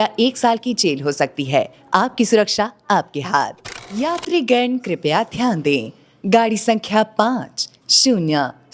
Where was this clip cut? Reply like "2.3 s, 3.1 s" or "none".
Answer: 4.0 s